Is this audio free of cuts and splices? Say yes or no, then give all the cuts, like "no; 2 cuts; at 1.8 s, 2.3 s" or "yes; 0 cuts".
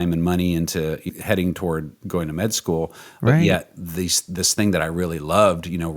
no; 2 cuts; at 1.0 s, 2.0 s